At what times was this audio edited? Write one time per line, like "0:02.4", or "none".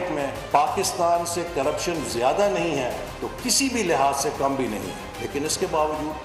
none